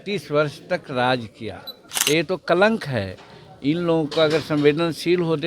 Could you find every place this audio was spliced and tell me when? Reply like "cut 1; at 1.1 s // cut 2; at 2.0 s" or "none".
cut 1; at 1.9 s